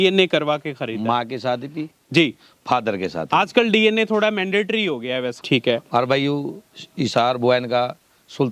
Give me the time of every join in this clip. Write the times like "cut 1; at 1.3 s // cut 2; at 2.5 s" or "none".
cut 1; at 5.4 s